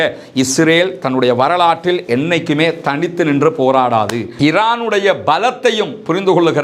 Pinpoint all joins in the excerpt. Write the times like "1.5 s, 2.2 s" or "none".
4.2 s